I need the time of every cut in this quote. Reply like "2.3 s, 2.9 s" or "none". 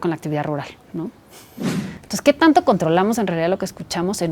1.5 s